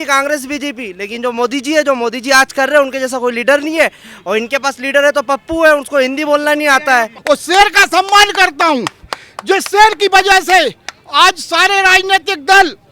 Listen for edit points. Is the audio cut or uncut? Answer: cut